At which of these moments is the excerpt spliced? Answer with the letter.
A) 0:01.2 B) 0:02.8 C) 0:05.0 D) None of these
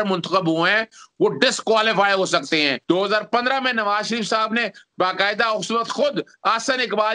B